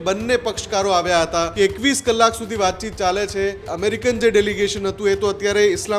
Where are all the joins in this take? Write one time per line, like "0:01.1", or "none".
0:01.5
0:03.7